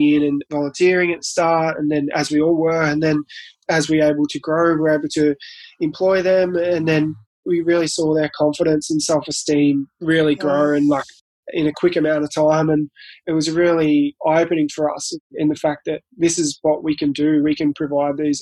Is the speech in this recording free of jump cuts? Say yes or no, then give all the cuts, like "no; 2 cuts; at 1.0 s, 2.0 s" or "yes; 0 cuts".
yes; 0 cuts